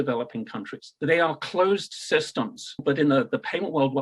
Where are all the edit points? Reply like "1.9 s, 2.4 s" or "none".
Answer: 0.9 s, 2.8 s